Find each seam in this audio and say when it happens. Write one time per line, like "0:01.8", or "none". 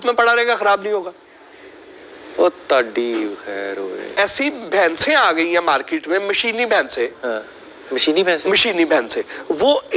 0:04.2

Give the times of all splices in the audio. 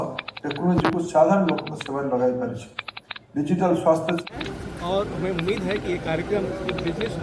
0:04.2

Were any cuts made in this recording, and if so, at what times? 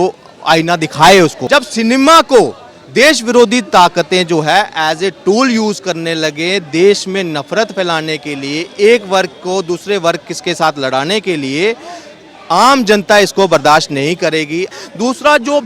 0:01.4
0:14.7

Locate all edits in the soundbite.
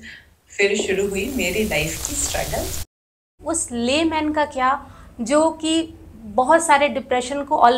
0:02.8

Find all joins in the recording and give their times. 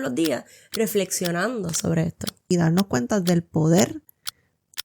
0:02.3

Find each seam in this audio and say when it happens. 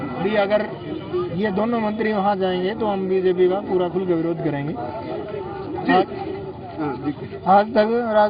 none

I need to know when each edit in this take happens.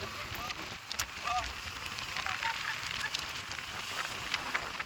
none

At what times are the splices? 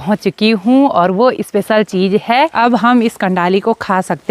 0:02.5

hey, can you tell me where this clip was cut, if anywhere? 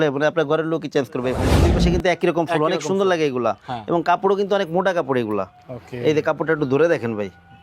0:01.5

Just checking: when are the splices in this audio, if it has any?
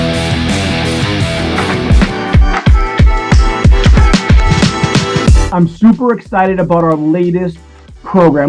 0:01.7

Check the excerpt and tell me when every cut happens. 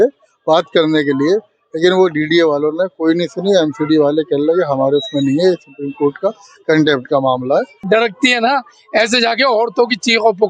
0:07.8

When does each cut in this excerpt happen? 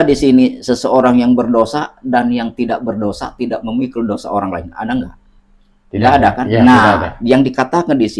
none

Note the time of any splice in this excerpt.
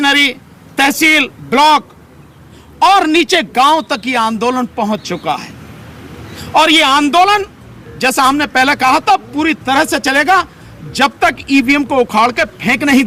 none

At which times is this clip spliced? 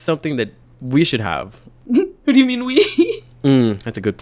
0:01.9

